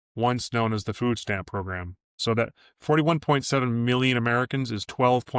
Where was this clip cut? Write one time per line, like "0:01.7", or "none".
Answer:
0:02.1